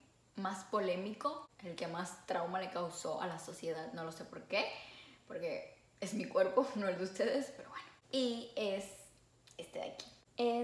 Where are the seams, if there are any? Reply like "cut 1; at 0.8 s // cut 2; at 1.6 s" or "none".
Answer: none